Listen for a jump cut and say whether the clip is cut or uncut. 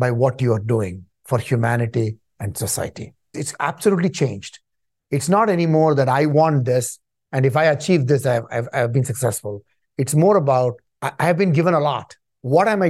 cut